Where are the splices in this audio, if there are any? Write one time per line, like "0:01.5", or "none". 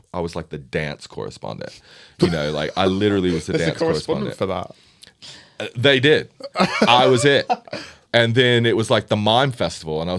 none